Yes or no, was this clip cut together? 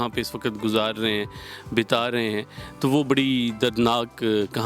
no